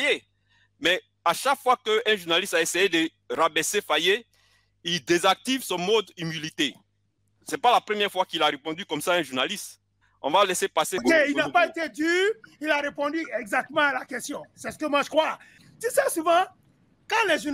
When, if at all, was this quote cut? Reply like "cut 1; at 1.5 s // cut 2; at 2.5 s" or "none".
cut 1; at 11.0 s // cut 2; at 15.5 s